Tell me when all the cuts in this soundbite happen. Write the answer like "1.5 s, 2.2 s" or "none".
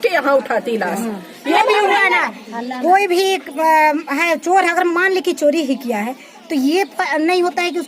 1.6 s